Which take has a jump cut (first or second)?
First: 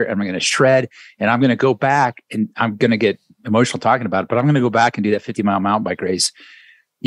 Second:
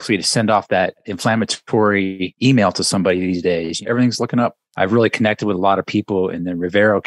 second